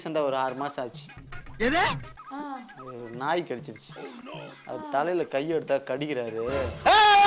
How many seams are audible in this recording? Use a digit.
0